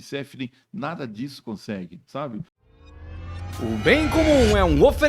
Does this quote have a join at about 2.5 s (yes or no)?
yes